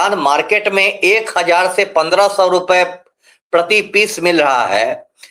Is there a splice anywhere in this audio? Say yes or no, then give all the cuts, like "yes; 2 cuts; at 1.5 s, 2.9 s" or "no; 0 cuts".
no; 0 cuts